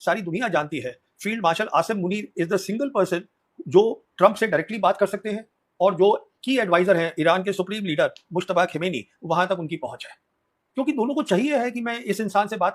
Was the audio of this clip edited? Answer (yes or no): no